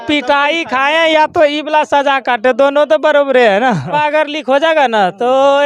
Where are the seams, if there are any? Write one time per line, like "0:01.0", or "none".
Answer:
0:03.9